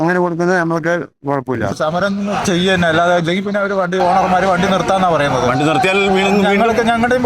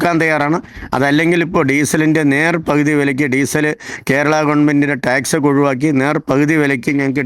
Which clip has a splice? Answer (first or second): first